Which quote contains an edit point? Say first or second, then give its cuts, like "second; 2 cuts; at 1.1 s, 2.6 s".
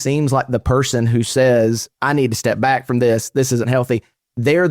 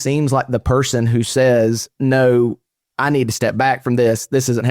first; 1 cut; at 1.9 s